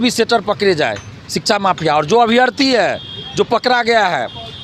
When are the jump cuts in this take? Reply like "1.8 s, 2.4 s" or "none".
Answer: none